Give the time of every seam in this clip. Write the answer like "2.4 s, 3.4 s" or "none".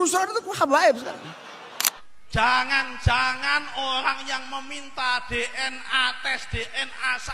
2.0 s